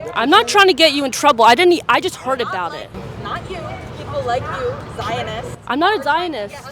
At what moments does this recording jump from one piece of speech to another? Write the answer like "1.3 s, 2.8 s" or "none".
none